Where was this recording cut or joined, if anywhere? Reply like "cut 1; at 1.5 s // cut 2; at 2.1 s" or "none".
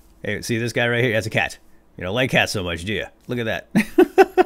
cut 1; at 3.2 s